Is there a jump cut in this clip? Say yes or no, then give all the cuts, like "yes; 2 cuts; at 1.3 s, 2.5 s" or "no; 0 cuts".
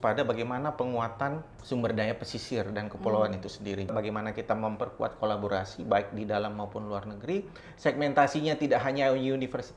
yes; 1 cut; at 3.9 s